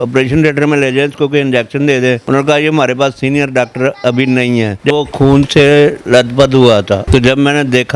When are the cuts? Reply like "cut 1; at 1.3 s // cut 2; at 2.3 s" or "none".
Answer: cut 1; at 5.0 s